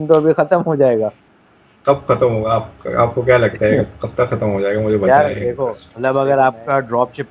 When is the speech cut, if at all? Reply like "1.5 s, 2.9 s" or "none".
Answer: 5.8 s